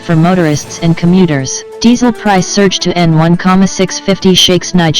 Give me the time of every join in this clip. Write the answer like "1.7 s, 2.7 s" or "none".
1.6 s